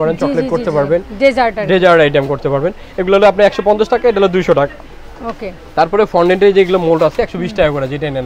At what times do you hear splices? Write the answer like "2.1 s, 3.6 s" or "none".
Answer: none